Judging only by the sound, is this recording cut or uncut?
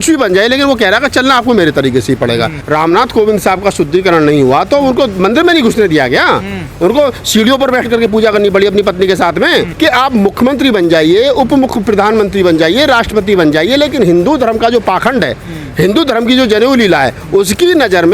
cut